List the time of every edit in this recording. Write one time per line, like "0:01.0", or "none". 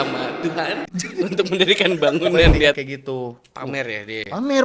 0:02.8